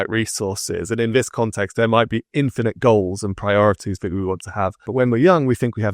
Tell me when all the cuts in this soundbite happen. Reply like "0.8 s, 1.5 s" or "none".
4.9 s